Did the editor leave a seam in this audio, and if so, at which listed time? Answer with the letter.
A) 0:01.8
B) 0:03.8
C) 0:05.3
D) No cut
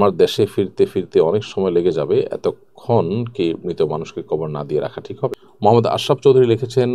C